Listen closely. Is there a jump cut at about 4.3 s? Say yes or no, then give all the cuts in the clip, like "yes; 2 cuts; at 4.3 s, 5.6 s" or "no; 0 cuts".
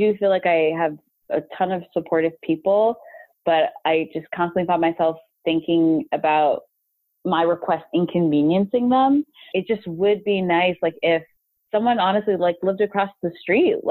no; 1 cut; at 9.5 s